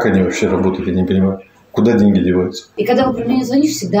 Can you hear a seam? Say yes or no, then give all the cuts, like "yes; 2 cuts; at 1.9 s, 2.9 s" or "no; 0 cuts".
yes; 1 cut; at 2.6 s